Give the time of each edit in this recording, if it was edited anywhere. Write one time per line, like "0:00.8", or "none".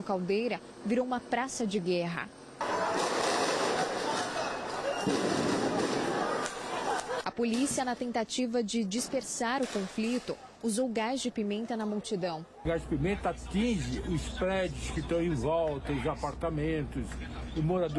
0:02.4
0:07.2
0:12.5

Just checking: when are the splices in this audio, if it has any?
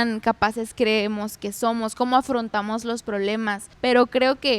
0:03.6

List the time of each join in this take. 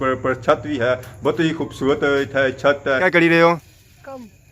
0:03.1

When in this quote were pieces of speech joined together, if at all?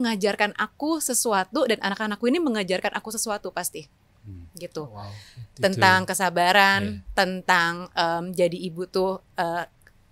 none

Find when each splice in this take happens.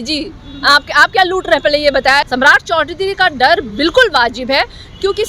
0:02.3

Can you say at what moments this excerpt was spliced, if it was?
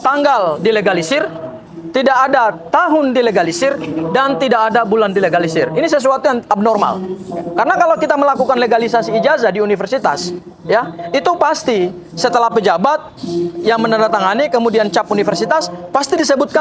none

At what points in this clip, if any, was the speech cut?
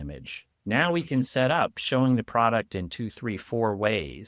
none

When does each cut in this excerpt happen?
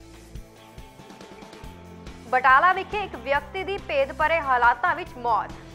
0:00.9

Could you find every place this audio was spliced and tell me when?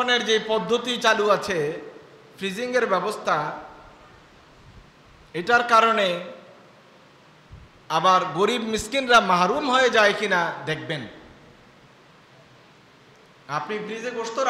none

